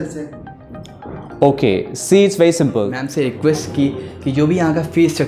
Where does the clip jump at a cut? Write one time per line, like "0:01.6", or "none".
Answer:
0:03.0